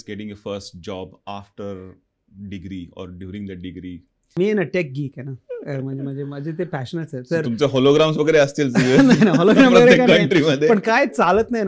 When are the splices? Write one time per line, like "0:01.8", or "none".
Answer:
0:04.3